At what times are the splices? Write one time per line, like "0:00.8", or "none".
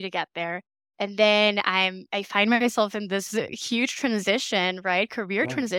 none